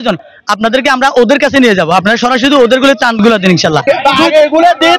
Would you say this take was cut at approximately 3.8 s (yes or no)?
yes